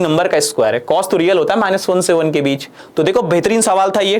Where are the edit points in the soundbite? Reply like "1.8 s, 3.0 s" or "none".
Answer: 2.8 s